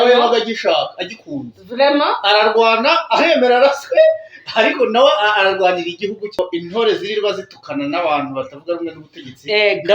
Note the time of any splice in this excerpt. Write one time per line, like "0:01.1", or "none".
0:06.4

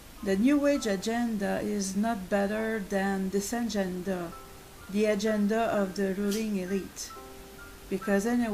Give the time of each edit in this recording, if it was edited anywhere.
0:02.1

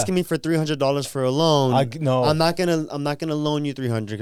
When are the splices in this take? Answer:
none

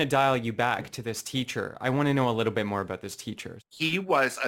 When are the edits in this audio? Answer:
0:03.5

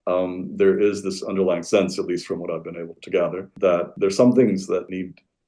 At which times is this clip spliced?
0:03.0

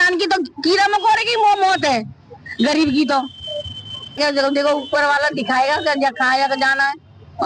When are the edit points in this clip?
none

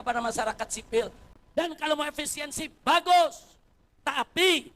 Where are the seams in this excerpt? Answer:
0:01.2

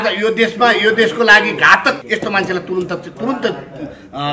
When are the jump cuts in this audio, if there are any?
0:02.0

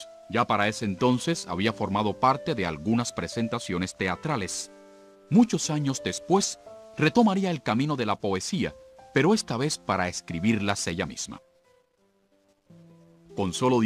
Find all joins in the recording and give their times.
0:08.0

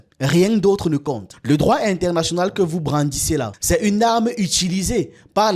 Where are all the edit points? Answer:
0:03.6

